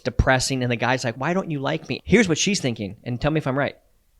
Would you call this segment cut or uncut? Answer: cut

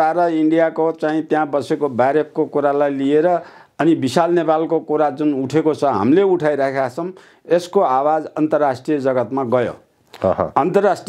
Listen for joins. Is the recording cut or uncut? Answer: uncut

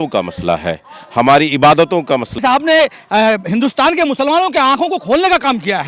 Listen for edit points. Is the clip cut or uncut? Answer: cut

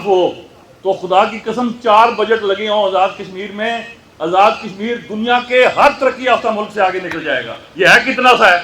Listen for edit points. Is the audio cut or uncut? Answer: uncut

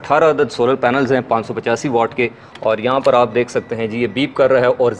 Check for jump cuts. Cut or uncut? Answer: cut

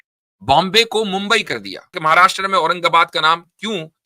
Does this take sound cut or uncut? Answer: cut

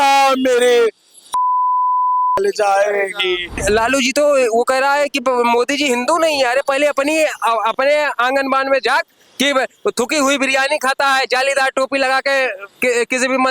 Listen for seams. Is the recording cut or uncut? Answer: cut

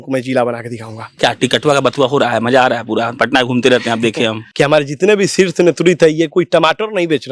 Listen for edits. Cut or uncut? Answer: cut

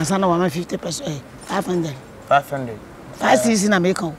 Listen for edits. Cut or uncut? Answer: uncut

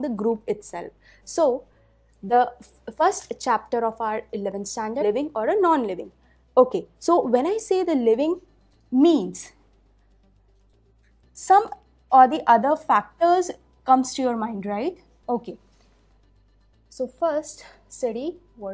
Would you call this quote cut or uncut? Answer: uncut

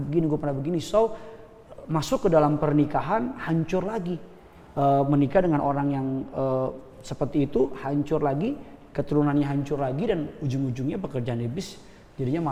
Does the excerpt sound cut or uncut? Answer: uncut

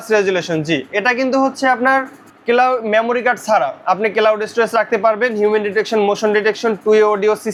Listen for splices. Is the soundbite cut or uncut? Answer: uncut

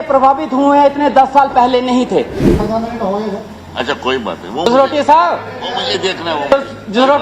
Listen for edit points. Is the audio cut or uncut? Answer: cut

